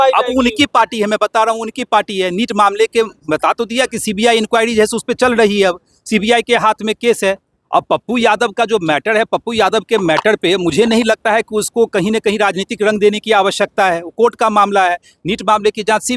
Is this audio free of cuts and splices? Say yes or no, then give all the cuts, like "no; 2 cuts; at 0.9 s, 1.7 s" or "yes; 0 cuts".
yes; 0 cuts